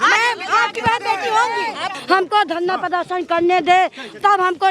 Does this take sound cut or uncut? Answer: cut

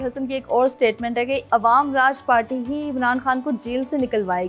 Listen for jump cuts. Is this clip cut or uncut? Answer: cut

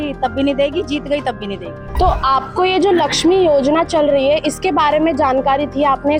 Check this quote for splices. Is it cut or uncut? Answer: uncut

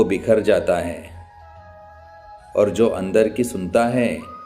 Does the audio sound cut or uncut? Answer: cut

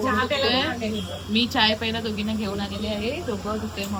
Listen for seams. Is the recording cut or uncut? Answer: uncut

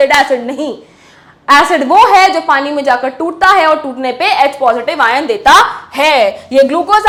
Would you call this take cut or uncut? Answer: uncut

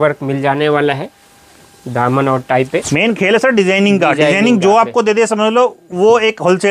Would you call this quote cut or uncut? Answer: uncut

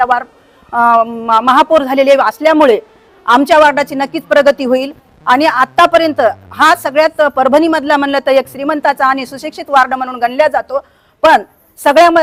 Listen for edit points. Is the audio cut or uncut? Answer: uncut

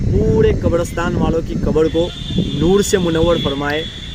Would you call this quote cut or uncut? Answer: uncut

